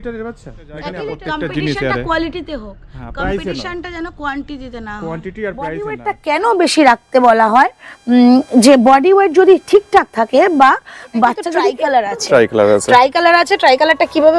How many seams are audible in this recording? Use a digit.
3